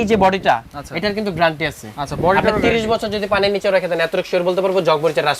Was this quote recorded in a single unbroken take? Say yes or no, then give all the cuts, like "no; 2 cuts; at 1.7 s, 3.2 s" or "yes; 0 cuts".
yes; 0 cuts